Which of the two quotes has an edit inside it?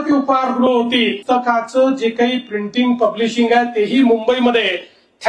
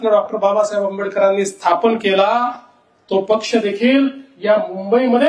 first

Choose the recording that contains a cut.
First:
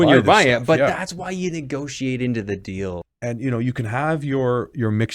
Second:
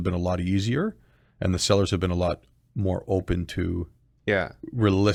first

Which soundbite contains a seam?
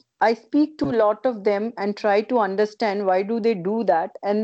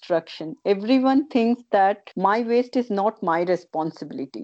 second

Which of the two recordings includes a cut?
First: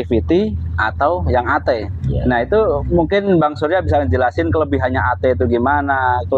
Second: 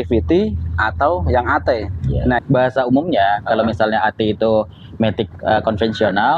second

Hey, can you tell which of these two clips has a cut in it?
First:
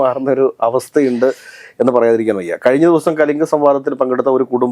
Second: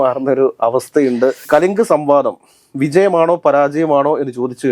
second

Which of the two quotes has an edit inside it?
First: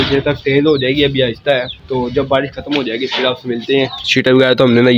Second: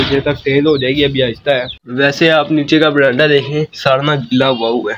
second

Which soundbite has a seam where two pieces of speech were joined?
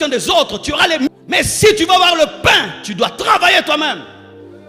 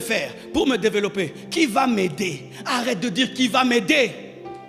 first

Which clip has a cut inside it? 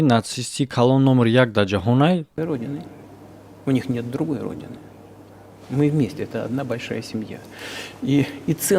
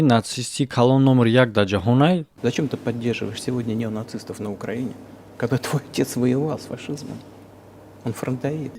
second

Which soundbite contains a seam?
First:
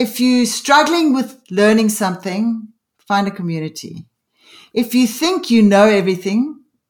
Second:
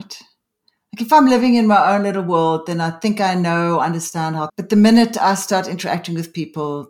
second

